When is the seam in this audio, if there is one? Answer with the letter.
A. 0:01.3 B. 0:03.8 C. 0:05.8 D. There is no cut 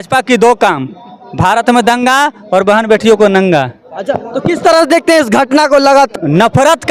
D